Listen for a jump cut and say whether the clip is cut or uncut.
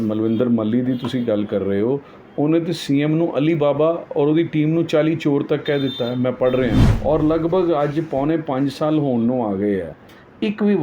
cut